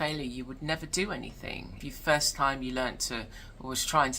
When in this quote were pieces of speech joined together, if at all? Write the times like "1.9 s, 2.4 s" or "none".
1.7 s